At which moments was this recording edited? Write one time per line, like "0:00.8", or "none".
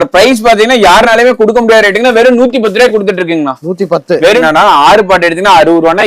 0:04.4